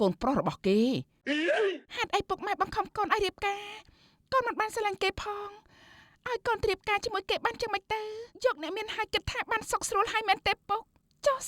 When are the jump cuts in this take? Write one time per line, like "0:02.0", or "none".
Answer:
0:08.2